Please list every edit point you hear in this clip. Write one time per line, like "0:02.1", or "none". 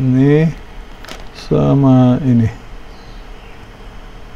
none